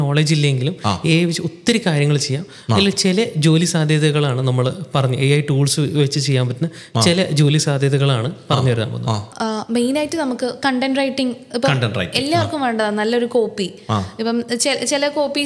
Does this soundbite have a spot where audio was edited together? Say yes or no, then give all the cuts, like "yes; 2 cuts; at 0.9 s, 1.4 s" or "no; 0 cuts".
no; 0 cuts